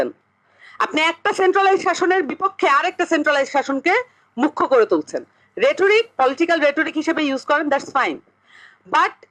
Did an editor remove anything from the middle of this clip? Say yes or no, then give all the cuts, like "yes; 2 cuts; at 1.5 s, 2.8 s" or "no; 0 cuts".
no; 0 cuts